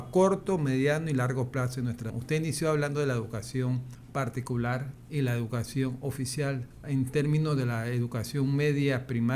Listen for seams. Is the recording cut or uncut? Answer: cut